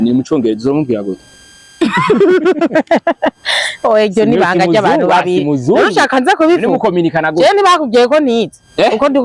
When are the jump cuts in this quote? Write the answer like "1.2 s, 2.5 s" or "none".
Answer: none

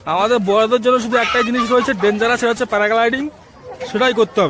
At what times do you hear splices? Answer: none

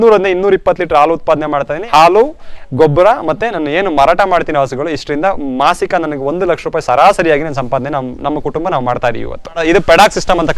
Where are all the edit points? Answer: 1.8 s, 9.6 s

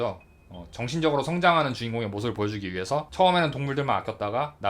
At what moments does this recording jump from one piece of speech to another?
3.1 s

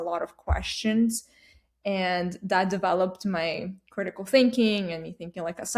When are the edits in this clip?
none

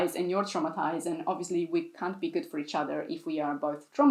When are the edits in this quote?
none

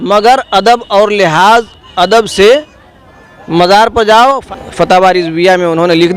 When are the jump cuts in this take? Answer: 4.4 s

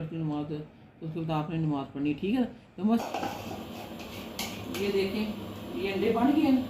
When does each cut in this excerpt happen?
3.0 s

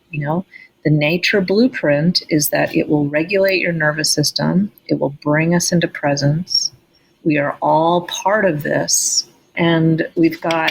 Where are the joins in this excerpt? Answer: 9.5 s

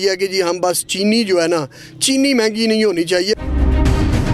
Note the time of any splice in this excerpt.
3.4 s

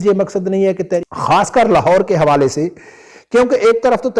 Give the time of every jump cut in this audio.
1.0 s

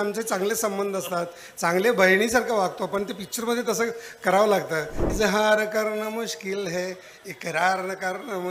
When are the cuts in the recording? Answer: 5.0 s

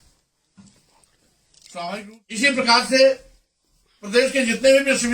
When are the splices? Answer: 2.0 s

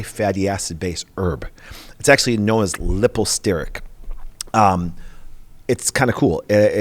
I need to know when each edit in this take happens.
none

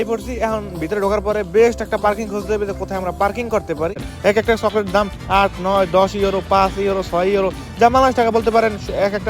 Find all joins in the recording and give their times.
4.1 s

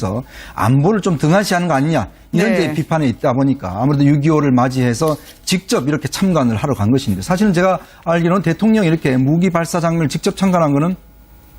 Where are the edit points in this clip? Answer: 6.2 s

